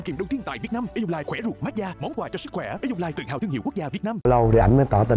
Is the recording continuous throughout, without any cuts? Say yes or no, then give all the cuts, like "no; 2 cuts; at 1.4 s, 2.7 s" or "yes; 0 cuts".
no; 1 cut; at 4.2 s